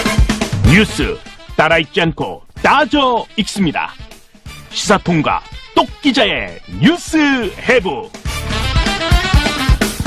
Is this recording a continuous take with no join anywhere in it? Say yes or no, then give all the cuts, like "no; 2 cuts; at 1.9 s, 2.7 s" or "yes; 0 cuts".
yes; 0 cuts